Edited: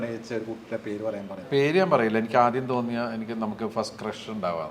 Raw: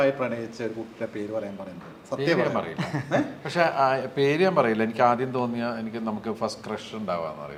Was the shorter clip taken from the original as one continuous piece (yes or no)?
no